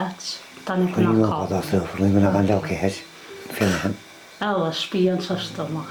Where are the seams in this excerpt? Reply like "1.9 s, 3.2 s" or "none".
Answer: none